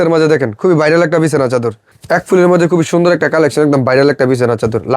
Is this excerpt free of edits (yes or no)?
no